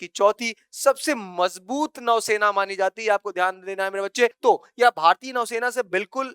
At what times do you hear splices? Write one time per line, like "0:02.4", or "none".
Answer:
0:04.4